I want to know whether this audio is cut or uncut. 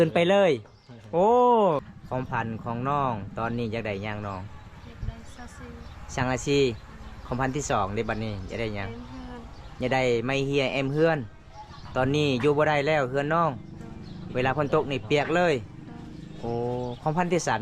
cut